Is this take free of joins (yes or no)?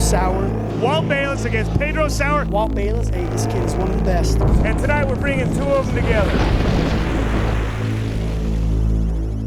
yes